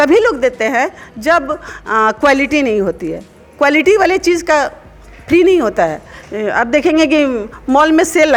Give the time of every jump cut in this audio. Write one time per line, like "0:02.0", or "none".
none